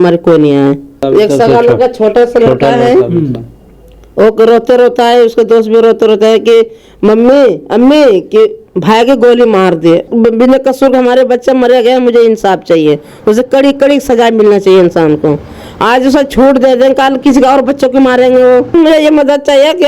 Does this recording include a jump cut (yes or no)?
yes